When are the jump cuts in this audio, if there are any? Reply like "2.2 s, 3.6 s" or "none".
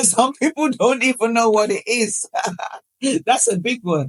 none